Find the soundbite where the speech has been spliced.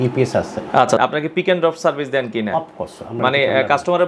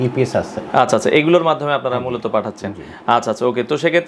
first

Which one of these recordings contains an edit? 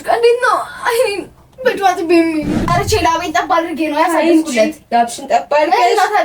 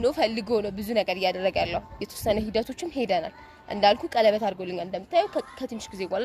first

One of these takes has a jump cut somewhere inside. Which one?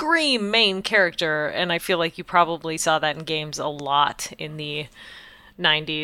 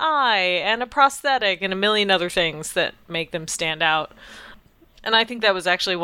second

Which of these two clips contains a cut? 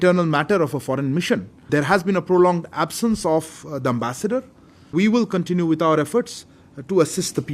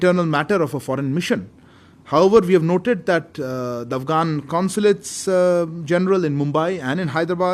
first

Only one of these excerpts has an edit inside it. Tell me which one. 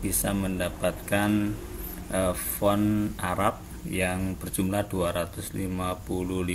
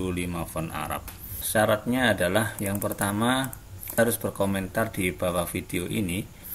second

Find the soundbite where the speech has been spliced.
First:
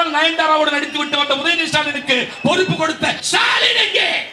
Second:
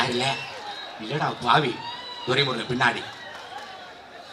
first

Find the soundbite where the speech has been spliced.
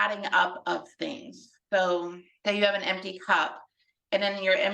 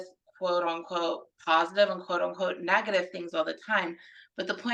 first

